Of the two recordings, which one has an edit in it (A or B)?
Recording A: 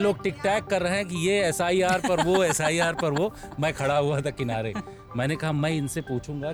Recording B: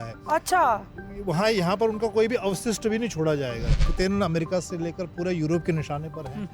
B